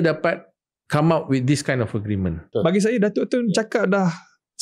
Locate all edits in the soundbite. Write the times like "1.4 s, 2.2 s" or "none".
2.5 s